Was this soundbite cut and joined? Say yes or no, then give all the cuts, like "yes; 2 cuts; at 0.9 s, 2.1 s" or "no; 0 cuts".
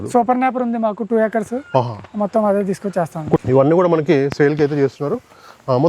yes; 1 cut; at 3.4 s